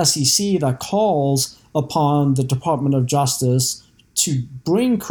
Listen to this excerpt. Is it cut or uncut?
uncut